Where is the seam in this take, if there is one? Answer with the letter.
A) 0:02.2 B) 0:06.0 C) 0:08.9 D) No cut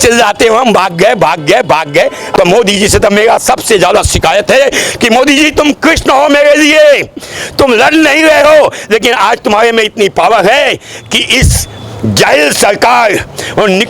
A